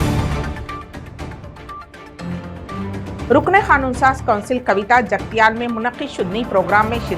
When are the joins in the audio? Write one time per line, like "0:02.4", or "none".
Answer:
0:03.3